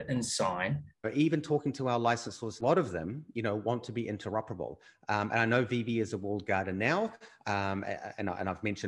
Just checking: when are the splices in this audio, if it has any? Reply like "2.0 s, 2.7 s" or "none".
1.0 s, 2.6 s